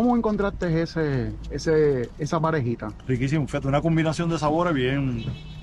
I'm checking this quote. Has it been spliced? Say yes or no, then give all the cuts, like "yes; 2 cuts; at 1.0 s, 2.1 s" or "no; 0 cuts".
no; 0 cuts